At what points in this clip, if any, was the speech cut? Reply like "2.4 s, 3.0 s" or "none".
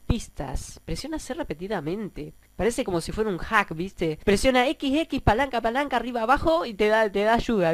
2.4 s, 4.2 s

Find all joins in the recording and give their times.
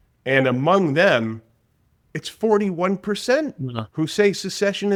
none

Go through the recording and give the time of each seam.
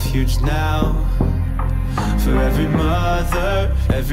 none

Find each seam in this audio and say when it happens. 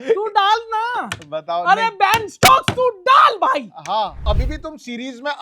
4.3 s

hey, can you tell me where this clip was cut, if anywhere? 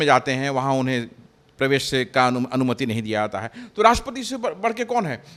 none

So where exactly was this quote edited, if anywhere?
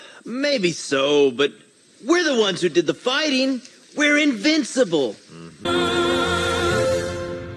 5.5 s

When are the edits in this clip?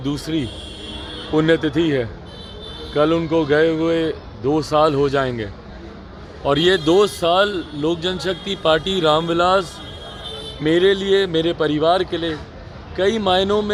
none

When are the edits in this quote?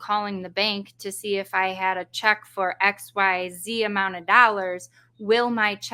none

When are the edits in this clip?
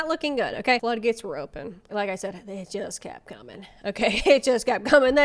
0.8 s, 1.9 s

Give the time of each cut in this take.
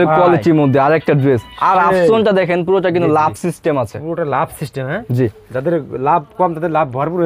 none

